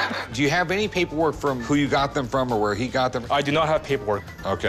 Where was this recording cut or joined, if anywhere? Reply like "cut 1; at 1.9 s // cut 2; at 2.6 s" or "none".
none